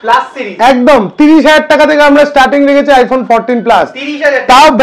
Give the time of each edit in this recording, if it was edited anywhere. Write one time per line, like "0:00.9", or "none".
none